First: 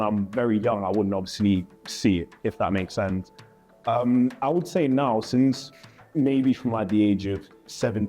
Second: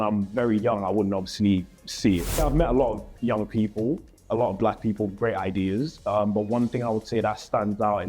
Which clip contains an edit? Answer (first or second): second